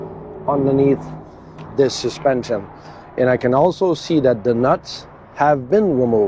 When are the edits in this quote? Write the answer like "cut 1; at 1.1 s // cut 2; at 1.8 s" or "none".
none